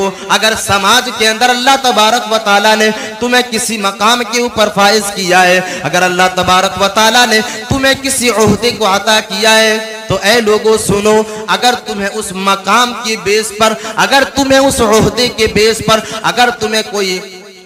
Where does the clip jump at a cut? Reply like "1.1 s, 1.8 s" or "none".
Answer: none